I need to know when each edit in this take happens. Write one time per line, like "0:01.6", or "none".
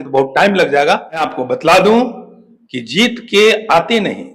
0:01.3